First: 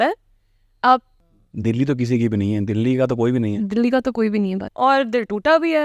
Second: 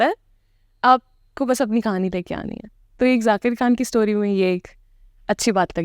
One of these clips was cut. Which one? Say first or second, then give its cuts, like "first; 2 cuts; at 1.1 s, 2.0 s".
first; 2 cuts; at 1.2 s, 4.7 s